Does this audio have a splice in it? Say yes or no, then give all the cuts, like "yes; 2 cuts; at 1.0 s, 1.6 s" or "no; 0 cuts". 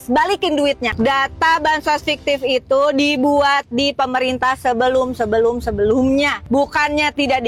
no; 0 cuts